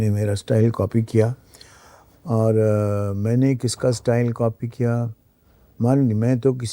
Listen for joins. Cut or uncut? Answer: uncut